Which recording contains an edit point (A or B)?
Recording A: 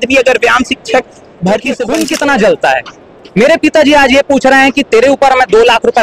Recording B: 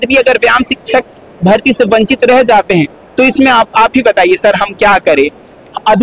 A